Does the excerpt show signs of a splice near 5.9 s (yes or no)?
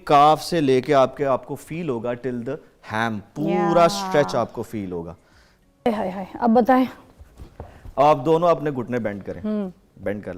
yes